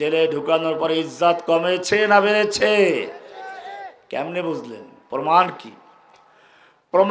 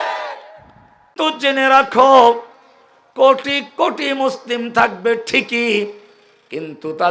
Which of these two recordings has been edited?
second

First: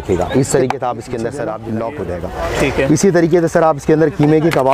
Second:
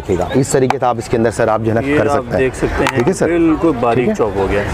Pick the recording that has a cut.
first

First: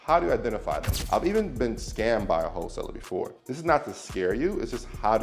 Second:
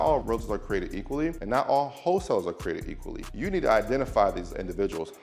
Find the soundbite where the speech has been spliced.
first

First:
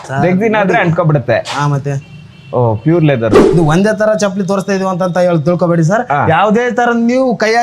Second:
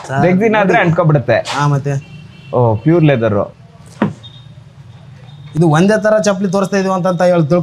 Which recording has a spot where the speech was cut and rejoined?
first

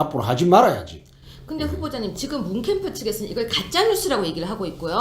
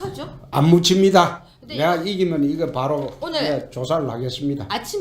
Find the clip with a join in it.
first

